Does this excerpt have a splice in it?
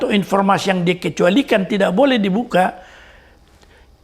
no; 0 cuts

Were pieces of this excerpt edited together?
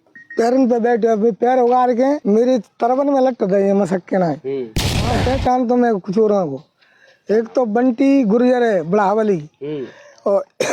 yes; 2 cuts; at 2.2 s, 5.2 s

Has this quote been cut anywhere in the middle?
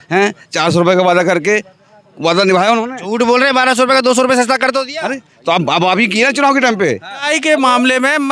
yes; 1 cut; at 7.2 s

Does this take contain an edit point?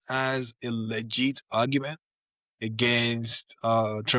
no; 0 cuts

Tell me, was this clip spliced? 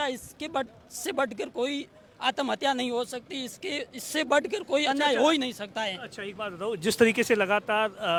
no; 0 cuts

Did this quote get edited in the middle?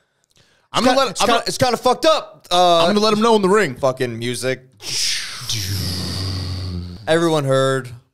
yes; 1 cut; at 6.9 s

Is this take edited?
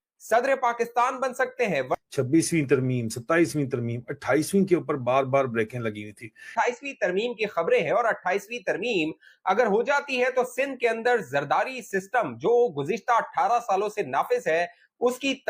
no; 0 cuts

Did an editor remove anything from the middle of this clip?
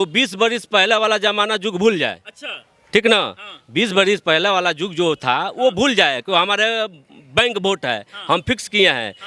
no; 0 cuts

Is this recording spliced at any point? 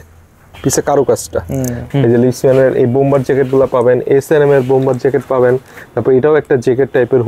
yes; 1 cut; at 1.8 s

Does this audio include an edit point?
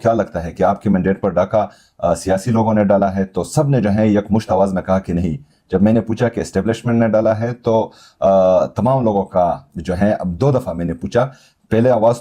no; 0 cuts

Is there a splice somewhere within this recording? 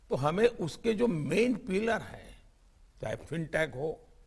yes; 1 cut; at 3.2 s

